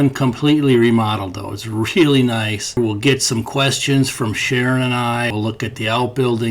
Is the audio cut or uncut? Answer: cut